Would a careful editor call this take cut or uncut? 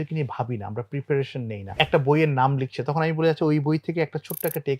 cut